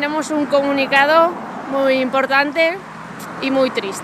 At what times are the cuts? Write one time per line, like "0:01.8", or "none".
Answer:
none